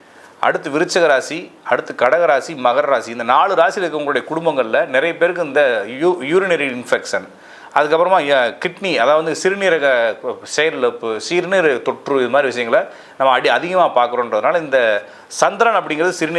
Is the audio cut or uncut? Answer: uncut